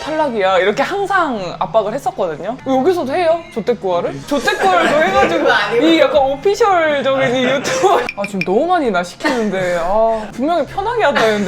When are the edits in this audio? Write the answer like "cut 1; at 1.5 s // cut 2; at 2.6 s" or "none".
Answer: cut 1; at 2.6 s // cut 2; at 10.3 s

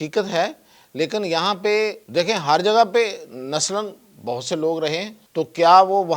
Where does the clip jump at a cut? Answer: cut 1; at 2.0 s // cut 2; at 5.2 s

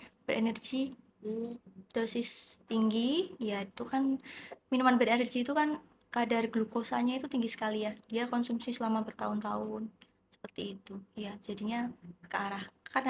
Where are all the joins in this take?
none

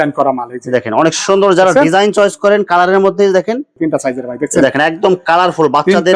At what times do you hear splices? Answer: cut 1; at 3.7 s

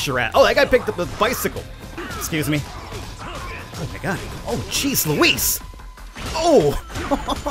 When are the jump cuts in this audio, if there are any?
cut 1; at 1.9 s

